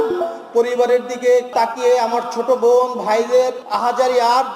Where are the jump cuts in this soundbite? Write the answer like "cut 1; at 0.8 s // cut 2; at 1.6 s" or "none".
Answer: cut 1; at 1.5 s // cut 2; at 3.6 s